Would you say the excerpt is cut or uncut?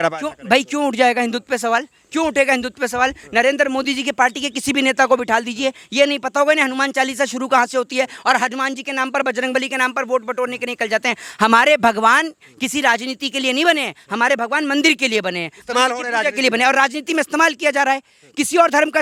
uncut